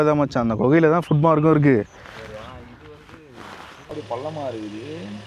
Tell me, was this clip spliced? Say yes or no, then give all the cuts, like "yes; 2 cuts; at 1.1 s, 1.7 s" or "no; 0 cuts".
yes; 2 cuts; at 2.4 s, 3.9 s